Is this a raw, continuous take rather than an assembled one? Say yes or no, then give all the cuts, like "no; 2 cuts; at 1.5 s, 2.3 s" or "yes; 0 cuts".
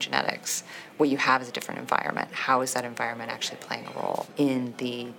no; 1 cut; at 4.3 s